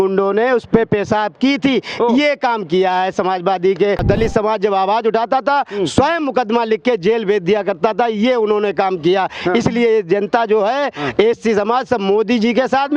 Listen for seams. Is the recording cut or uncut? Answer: cut